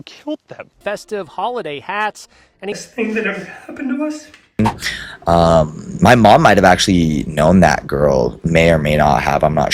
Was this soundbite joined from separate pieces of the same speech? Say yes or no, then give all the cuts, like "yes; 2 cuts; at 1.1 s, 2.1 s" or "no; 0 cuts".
yes; 1 cut; at 4.6 s